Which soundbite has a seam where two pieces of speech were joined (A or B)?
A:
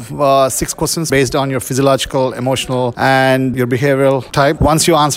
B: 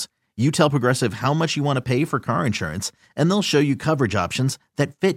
A